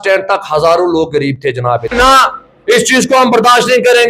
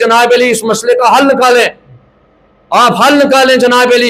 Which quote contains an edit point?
first; 1 cut; at 1.9 s

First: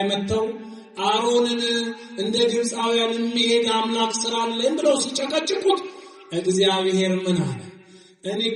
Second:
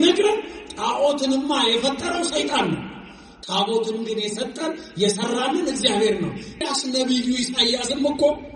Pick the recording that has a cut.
second; 1 cut; at 6.7 s

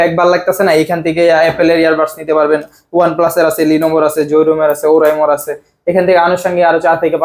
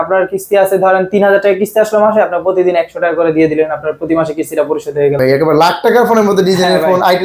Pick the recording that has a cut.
second; 1 cut; at 5.2 s

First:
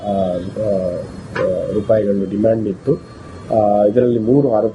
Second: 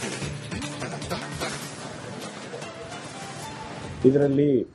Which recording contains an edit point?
second; 1 cut; at 0.9 s

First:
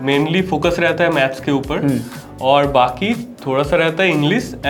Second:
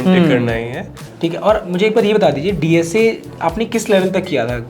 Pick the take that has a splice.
second; 1 cut; at 0.9 s

